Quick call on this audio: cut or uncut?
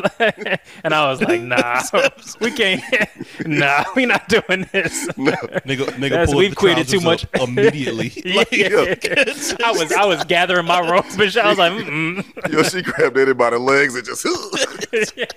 uncut